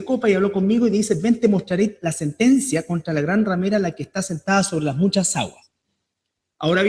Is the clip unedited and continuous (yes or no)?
yes